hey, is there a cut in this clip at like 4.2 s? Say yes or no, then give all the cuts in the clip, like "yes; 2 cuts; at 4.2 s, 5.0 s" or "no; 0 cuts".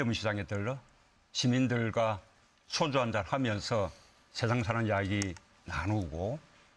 no; 1 cut; at 5.7 s